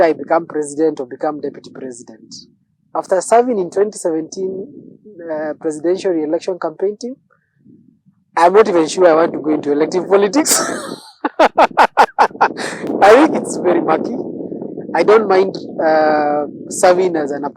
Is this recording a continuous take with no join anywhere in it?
yes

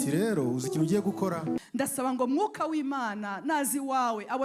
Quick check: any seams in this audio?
yes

